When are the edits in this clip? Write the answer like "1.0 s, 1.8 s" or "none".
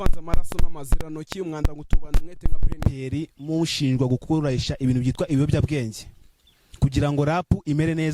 2.8 s